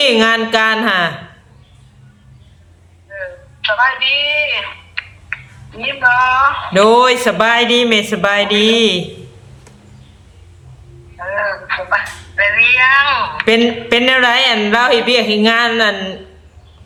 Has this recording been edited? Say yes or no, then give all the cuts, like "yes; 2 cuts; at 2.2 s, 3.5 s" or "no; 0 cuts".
no; 0 cuts